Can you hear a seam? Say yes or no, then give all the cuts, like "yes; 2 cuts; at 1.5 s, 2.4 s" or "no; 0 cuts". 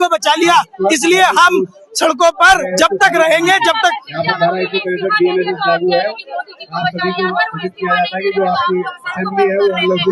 no; 0 cuts